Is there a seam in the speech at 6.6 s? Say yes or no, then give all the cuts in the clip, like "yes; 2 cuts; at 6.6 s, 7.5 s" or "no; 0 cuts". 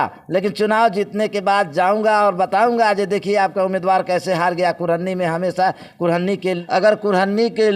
yes; 1 cut; at 6.6 s